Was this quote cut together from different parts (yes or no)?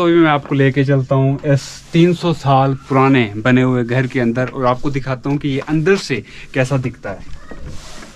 no